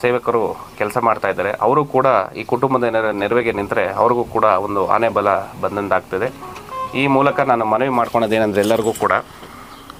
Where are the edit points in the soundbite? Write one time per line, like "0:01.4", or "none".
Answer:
none